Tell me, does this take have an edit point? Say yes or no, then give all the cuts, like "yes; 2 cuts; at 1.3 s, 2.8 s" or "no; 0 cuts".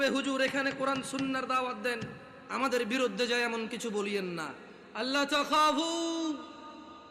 no; 0 cuts